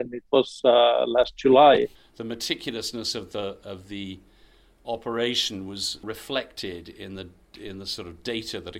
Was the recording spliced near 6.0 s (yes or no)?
yes